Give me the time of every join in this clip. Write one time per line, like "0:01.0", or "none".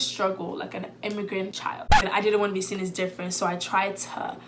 0:02.0